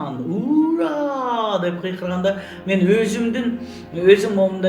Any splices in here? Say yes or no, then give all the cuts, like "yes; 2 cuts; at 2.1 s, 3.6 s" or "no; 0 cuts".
no; 0 cuts